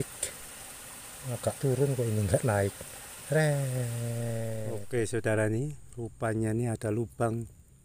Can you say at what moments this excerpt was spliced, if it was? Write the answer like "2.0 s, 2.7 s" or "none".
4.6 s